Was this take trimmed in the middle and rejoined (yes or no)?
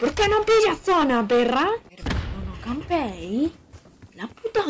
yes